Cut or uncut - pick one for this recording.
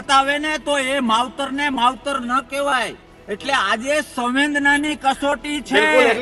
uncut